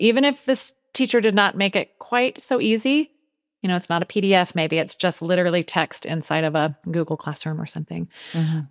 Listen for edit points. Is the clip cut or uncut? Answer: cut